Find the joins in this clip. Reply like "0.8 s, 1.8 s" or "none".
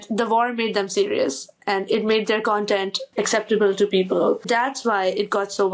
3.0 s, 4.4 s